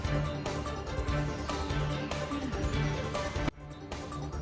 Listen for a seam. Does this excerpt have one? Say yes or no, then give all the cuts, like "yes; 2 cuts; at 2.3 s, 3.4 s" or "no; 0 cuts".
yes; 1 cut; at 1.2 s